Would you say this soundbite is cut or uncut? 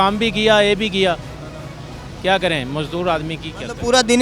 uncut